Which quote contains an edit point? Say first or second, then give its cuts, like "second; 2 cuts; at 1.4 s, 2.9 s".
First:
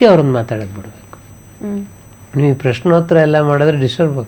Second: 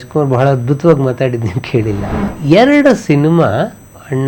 second; 1 cut; at 2.3 s